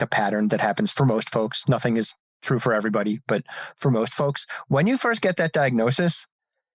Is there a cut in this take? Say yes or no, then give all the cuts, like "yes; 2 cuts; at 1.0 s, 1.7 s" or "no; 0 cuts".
no; 0 cuts